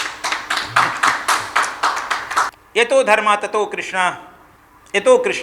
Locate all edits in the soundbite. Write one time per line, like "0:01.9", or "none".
0:02.5